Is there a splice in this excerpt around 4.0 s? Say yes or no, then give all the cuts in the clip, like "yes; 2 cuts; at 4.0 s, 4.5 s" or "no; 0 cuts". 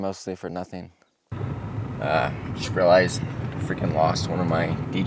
no; 1 cut; at 1.3 s